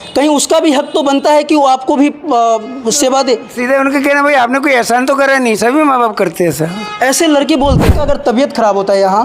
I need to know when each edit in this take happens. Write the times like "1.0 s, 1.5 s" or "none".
7.9 s